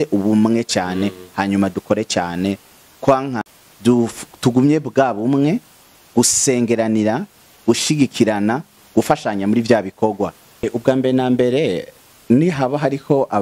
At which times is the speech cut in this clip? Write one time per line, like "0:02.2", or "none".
0:03.4
0:10.7